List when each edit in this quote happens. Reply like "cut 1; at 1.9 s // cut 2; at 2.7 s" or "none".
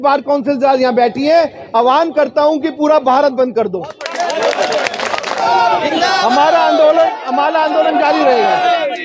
cut 1; at 5.4 s